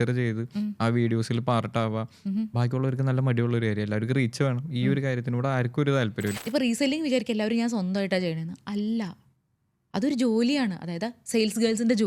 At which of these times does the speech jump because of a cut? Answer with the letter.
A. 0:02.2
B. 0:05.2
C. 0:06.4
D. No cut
C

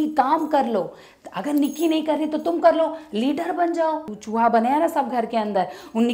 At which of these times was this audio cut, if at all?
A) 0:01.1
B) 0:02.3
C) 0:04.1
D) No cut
C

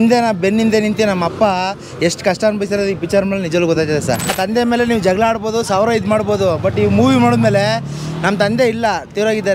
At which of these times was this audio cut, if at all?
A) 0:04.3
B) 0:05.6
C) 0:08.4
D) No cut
A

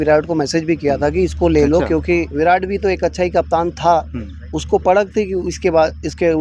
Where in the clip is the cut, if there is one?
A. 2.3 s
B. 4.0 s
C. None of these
A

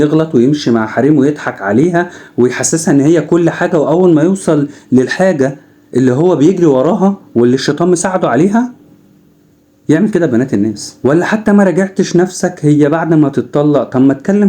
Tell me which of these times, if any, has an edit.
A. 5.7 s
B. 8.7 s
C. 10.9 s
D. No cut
C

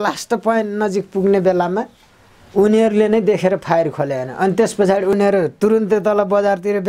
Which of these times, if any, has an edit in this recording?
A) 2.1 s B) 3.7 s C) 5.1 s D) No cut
C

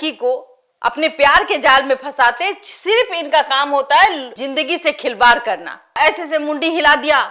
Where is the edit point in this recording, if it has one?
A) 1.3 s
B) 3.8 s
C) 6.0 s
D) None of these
C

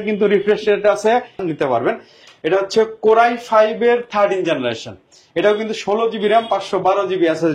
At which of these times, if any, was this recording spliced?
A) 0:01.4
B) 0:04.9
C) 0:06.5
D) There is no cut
A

